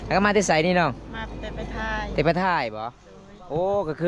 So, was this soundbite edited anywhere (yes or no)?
no